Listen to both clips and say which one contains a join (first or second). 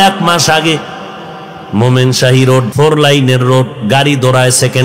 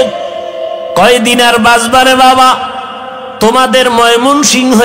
first